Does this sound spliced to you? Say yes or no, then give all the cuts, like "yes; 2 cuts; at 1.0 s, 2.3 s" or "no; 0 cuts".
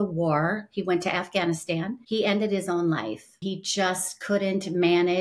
yes; 2 cuts; at 2.0 s, 3.4 s